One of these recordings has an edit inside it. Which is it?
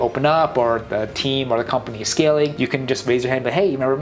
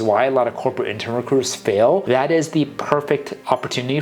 second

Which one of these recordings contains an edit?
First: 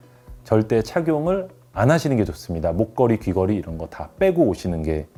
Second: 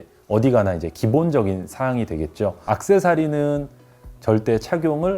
second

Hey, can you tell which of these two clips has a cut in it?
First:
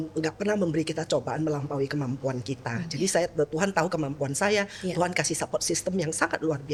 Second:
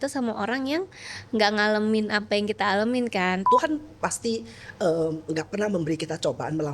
second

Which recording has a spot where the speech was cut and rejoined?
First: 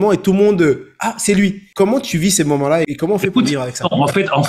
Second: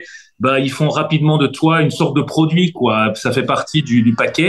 first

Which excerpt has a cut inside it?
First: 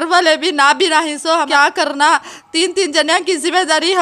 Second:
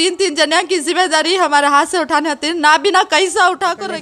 first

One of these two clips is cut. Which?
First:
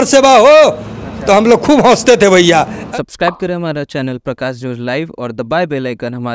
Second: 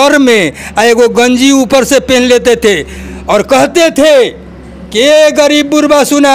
first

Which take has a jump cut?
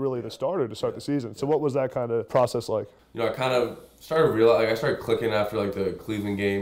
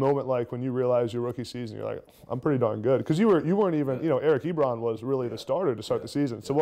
first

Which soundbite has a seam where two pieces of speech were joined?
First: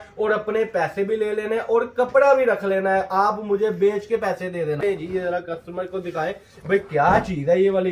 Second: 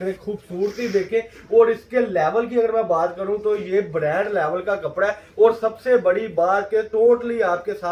first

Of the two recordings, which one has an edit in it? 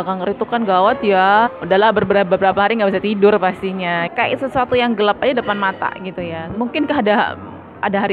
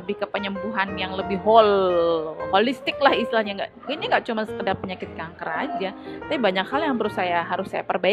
first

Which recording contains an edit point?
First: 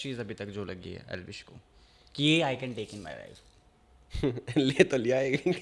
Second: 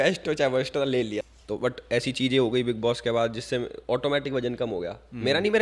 second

